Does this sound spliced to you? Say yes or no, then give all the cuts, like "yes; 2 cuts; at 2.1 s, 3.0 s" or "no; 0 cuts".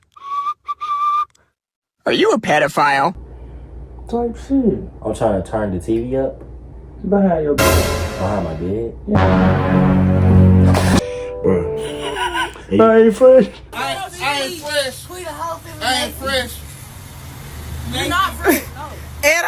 yes; 1 cut; at 11.0 s